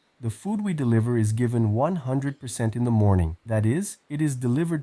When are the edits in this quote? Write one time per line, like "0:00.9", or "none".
0:03.7